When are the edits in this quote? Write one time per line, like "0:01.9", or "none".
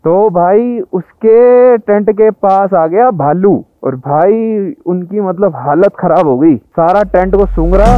0:03.8